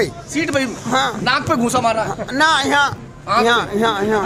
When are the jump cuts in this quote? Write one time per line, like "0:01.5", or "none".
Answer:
none